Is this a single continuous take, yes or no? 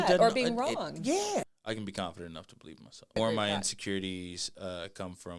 no